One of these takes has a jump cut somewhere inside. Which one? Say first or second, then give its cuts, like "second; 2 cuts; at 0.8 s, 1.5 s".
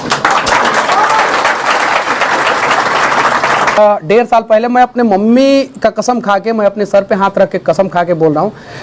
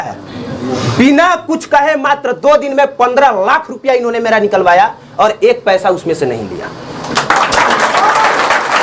first; 1 cut; at 3.8 s